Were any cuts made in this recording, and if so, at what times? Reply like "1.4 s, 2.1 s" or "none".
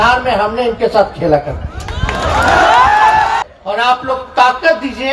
3.4 s